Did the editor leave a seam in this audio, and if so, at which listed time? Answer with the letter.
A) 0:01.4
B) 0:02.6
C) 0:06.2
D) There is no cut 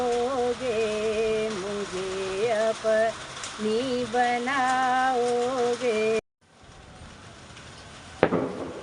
C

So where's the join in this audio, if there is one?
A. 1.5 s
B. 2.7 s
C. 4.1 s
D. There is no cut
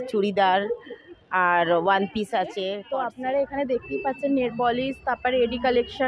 B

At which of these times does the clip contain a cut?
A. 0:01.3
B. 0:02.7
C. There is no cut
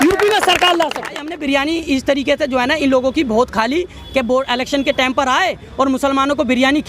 A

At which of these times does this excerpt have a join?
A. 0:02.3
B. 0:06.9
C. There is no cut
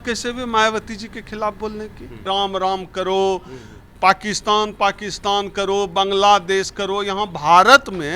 A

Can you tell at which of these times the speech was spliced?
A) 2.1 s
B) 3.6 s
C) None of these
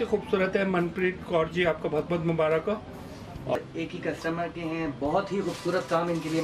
B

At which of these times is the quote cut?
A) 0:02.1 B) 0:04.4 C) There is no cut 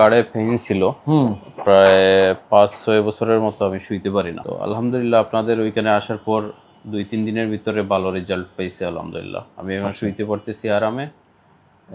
B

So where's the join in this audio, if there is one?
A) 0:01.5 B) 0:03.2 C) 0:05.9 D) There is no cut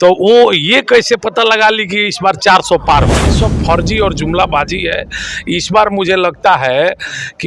B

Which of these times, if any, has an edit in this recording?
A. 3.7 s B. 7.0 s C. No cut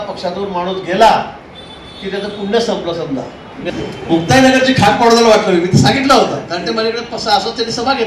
A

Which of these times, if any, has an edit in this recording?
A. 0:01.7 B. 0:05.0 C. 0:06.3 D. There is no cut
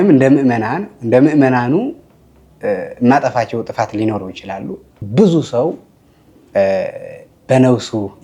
B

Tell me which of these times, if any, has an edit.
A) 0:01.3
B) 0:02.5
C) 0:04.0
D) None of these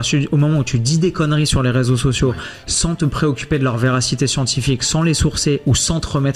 D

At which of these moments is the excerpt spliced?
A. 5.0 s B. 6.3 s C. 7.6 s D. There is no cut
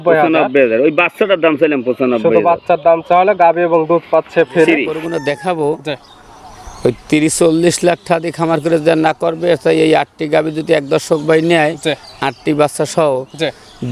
A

